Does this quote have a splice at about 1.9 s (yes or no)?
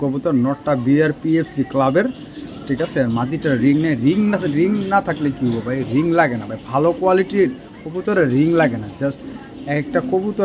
no